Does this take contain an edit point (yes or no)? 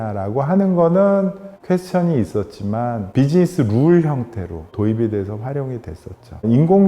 yes